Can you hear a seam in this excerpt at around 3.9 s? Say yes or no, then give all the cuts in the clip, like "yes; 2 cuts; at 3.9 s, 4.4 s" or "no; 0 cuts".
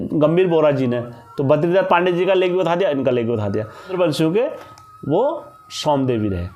yes; 1 cut; at 3.9 s